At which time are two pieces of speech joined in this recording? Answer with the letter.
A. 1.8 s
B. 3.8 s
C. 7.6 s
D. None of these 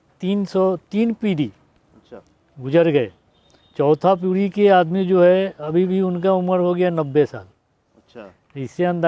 D